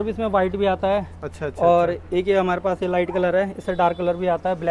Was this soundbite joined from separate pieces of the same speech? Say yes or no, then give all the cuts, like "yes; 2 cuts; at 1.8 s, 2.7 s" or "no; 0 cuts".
no; 0 cuts